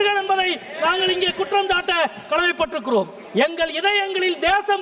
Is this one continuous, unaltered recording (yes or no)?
no